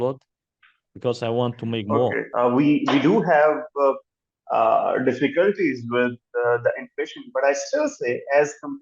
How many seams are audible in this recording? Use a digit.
1